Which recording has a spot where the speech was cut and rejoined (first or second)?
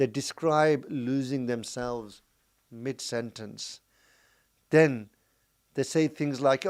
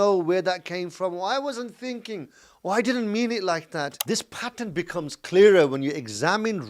second